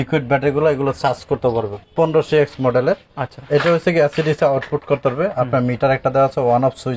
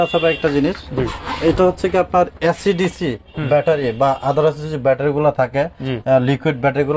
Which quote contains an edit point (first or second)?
first